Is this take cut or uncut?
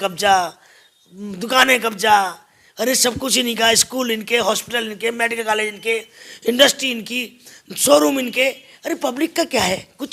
uncut